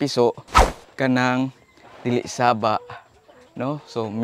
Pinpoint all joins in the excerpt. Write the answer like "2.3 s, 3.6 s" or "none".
none